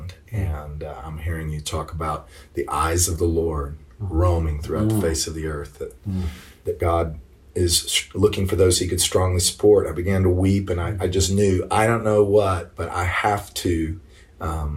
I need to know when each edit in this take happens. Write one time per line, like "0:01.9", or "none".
0:06.4

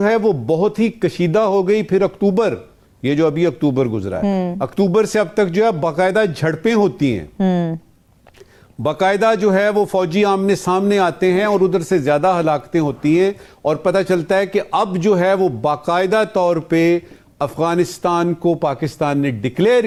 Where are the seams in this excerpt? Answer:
none

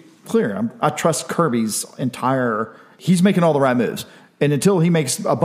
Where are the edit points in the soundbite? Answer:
0:02.9

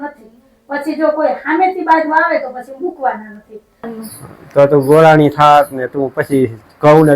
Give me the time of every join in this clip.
0:03.9

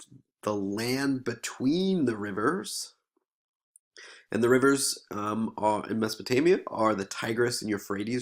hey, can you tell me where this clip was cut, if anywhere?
0:02.4

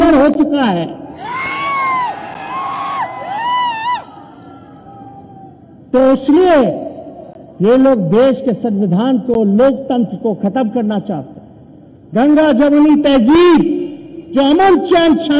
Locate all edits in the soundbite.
none

